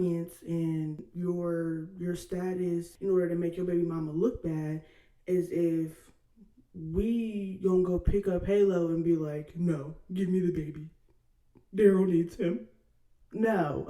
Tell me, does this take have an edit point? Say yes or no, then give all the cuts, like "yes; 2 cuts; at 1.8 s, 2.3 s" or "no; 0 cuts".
yes; 2 cuts; at 1.0 s, 2.9 s